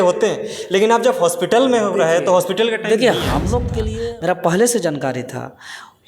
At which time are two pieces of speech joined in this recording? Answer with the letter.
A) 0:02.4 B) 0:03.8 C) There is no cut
B